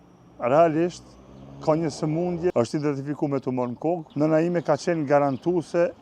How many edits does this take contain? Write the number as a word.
two